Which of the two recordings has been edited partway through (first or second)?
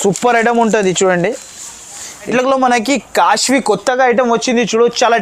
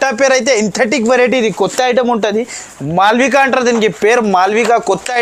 first